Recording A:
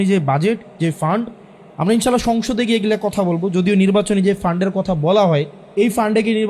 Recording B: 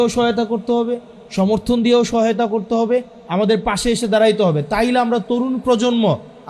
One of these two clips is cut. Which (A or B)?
A